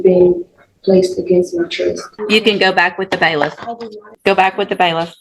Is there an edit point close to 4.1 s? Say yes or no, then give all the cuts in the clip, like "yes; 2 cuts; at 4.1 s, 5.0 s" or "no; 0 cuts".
yes; 2 cuts; at 2.1 s, 4.1 s